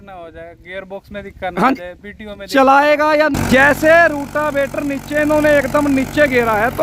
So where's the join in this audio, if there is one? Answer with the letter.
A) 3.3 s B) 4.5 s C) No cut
A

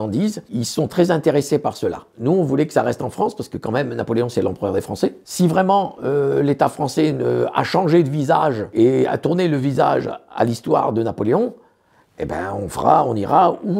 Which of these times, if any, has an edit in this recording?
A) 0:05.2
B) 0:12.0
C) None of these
A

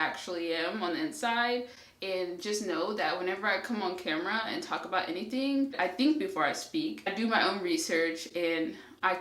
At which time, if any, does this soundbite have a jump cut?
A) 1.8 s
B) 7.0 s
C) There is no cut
B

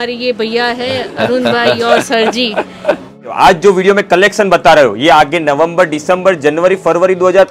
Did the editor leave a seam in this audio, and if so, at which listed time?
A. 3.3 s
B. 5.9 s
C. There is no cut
A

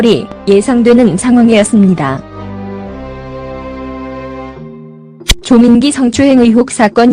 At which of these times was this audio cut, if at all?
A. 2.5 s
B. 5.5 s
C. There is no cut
A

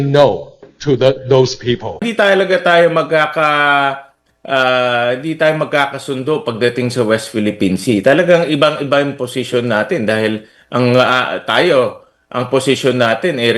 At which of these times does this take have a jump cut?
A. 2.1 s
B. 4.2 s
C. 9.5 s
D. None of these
A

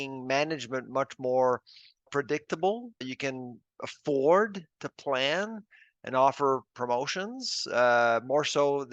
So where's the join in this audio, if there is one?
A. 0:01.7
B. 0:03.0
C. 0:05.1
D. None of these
B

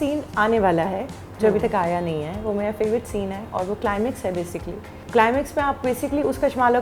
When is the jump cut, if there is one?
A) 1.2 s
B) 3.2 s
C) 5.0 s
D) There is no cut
C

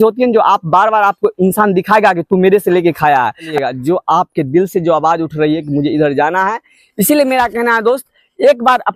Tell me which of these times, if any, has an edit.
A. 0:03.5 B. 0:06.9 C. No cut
A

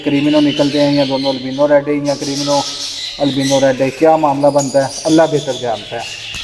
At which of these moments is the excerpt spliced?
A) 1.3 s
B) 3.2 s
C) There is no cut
C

